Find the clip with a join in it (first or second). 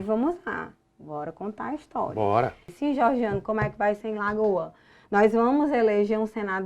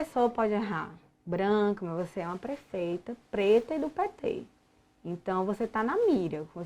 first